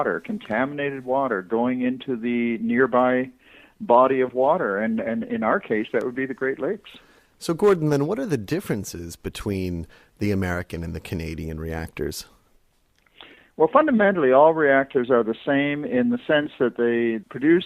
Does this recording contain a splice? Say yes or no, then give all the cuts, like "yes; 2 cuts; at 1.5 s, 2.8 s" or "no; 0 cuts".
yes; 1 cut; at 6.3 s